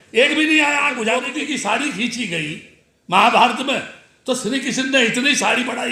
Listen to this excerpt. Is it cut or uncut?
cut